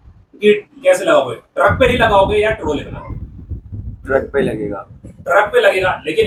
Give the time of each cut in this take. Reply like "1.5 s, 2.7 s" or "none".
none